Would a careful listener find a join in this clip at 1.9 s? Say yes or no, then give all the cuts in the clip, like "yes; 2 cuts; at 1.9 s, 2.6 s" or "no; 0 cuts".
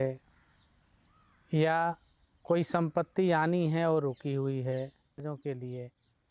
no; 1 cut; at 5.2 s